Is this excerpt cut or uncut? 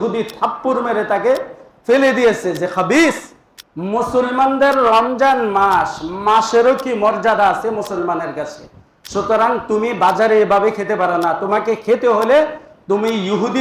uncut